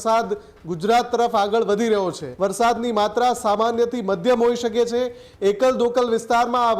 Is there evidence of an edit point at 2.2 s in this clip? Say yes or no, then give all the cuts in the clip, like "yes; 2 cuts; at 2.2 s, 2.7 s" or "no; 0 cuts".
yes; 1 cut; at 2.2 s